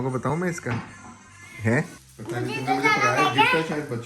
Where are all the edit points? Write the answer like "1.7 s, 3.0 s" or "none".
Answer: 2.1 s